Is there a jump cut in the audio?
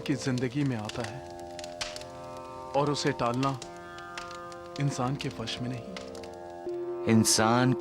yes; 1 cut; at 6.7 s

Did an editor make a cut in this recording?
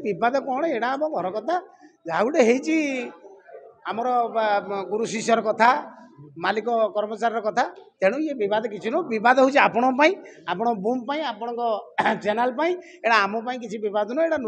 no; 0 cuts

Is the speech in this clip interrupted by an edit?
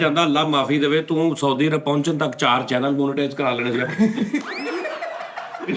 no; 0 cuts

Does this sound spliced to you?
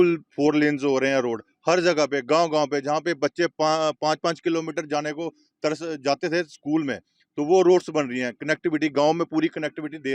no; 0 cuts

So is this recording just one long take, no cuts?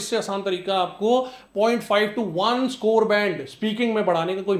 yes; 0 cuts

